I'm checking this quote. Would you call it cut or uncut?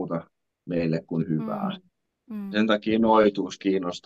uncut